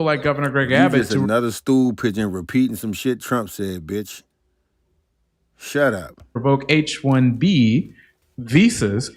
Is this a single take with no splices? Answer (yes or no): yes